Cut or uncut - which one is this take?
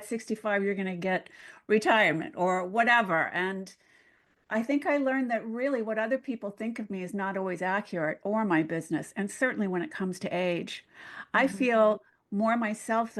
uncut